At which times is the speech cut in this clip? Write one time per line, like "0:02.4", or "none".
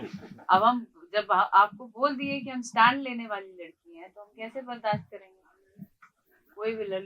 none